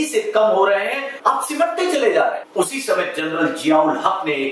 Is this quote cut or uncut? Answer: cut